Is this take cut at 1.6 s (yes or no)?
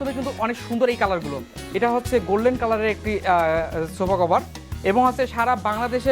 yes